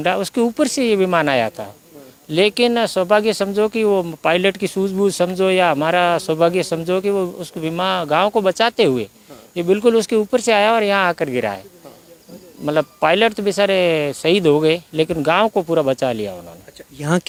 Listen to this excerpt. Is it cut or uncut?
uncut